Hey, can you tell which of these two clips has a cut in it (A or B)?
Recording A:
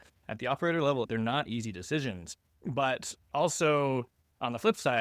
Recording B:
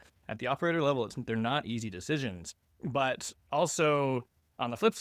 A